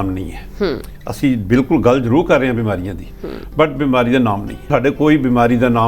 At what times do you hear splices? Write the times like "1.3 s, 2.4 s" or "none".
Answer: 4.7 s